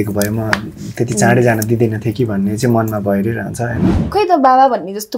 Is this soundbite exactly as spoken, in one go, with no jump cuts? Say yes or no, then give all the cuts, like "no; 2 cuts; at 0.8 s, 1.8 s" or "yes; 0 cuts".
no; 1 cut; at 4.0 s